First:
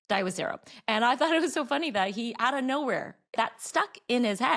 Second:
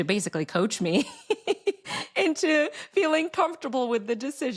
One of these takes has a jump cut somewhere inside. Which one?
first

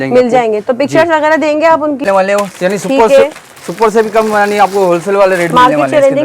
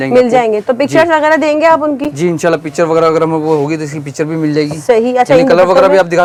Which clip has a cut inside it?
first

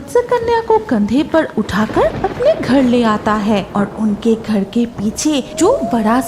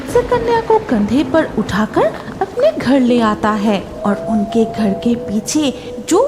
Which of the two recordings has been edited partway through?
first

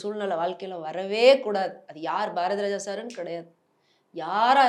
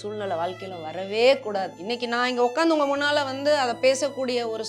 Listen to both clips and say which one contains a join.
second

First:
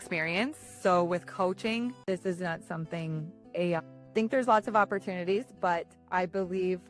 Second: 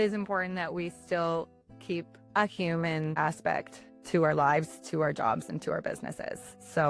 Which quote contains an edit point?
first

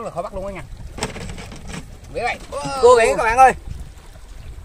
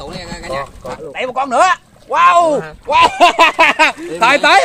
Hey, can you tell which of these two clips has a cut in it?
second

